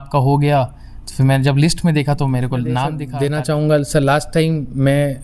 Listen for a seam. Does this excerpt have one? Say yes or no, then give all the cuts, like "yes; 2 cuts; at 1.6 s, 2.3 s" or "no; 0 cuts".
yes; 1 cut; at 3.0 s